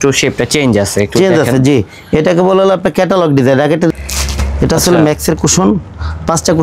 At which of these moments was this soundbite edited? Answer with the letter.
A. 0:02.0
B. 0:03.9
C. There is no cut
B